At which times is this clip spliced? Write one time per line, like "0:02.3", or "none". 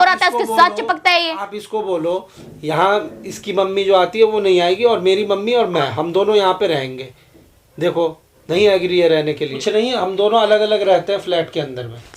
0:09.6